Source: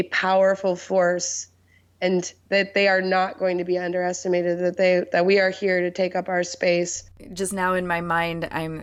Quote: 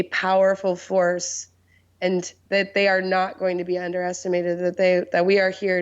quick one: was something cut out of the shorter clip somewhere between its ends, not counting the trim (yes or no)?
no